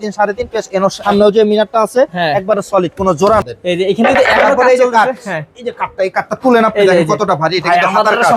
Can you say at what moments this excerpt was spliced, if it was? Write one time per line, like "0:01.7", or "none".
0:01.0
0:03.4